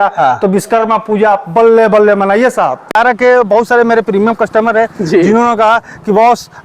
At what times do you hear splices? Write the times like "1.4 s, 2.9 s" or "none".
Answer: 2.9 s